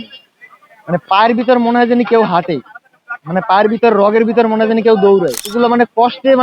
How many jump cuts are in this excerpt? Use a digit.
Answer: 1